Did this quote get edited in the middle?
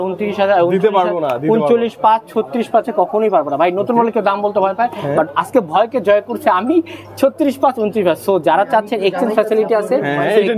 no; 0 cuts

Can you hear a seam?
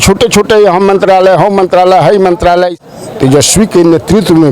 yes; 1 cut; at 2.8 s

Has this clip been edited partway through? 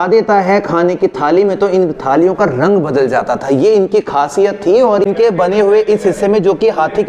yes; 1 cut; at 5.1 s

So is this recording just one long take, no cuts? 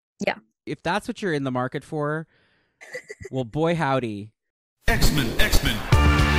no; 1 cut; at 4.7 s

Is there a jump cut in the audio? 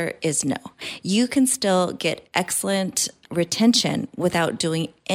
no; 0 cuts

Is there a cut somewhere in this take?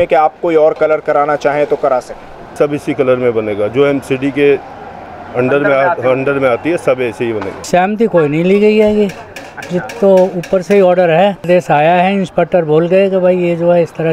yes; 3 cuts; at 2.5 s, 7.7 s, 11.5 s

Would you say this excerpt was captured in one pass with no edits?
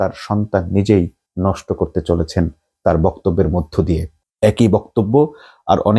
yes; 0 cuts

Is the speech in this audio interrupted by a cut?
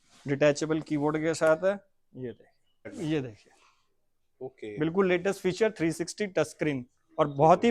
yes; 1 cut; at 2.9 s

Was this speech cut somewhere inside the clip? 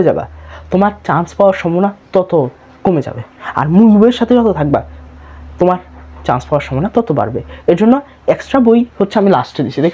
no; 0 cuts

